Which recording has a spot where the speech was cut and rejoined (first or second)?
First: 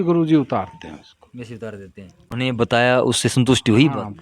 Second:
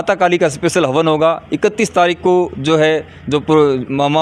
first